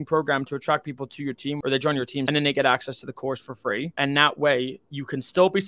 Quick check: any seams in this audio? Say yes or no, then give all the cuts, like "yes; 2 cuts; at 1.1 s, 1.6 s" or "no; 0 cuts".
yes; 2 cuts; at 1.9 s, 3.9 s